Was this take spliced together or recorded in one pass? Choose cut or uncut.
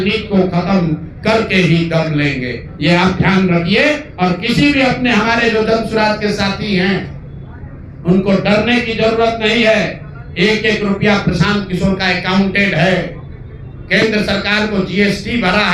uncut